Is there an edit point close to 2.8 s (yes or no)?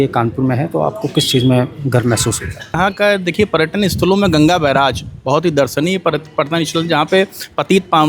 yes